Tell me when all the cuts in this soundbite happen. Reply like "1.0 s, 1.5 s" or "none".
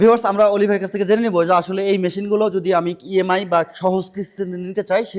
none